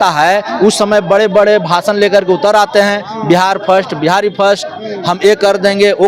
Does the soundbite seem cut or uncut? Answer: uncut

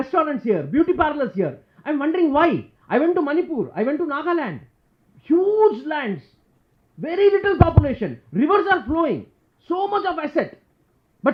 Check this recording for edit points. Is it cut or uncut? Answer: uncut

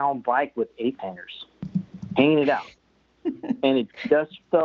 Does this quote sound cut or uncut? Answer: uncut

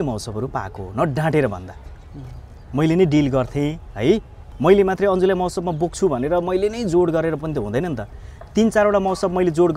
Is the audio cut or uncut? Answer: cut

